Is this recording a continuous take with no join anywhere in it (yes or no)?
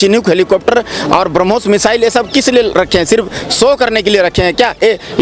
yes